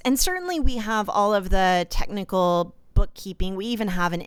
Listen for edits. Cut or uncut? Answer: uncut